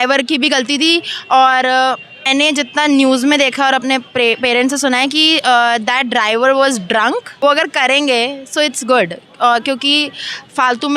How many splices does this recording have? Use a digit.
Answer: 2